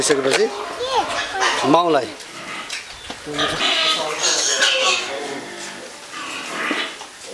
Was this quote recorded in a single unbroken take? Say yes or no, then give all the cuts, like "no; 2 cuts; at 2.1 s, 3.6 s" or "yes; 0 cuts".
no; 1 cut; at 3.6 s